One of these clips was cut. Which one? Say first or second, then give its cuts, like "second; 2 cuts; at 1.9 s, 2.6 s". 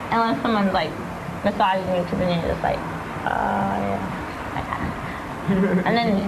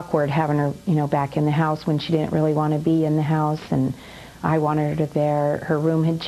second; 1 cut; at 3.1 s